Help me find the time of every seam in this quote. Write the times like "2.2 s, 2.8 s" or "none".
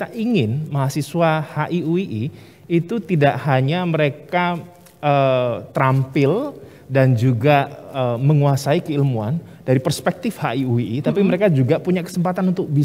none